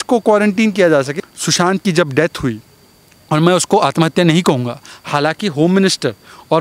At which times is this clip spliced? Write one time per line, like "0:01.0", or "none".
0:01.1